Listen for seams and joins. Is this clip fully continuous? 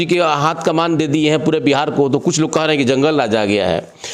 yes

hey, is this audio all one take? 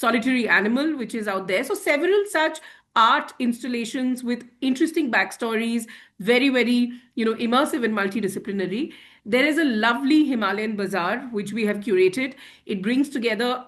yes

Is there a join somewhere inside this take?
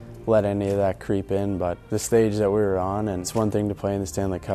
yes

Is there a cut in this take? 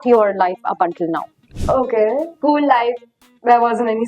yes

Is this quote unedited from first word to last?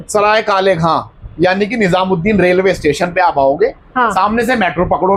yes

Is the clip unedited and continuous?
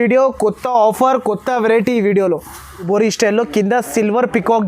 no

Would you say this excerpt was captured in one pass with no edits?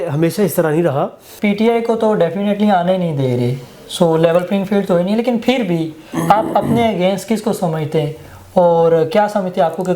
no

